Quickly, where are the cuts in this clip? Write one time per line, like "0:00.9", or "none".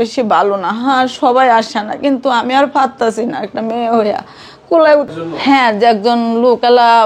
0:05.1